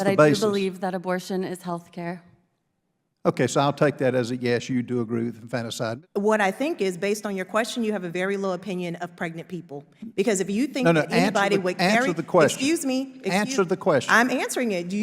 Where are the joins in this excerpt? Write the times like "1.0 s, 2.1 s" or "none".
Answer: 6.0 s